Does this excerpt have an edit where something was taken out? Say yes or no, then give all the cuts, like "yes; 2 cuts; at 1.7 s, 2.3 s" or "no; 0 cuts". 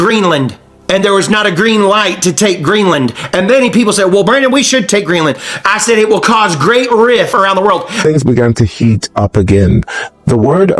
yes; 1 cut; at 7.5 s